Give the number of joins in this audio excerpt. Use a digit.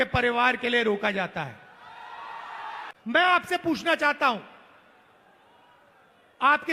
1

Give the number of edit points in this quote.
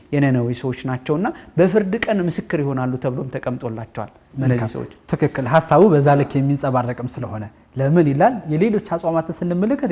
0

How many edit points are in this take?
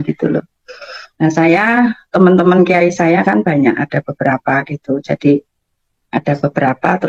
0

